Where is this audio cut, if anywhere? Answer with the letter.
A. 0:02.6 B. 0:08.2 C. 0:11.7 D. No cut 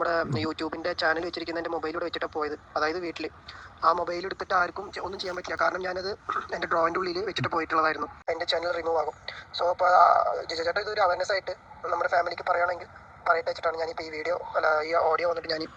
B